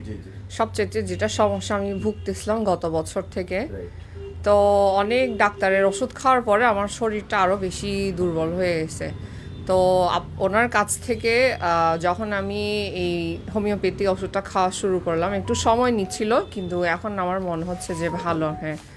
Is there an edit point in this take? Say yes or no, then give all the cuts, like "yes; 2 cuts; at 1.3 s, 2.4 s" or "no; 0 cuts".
no; 0 cuts